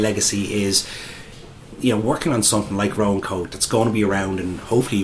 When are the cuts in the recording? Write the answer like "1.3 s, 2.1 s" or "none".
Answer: 1.7 s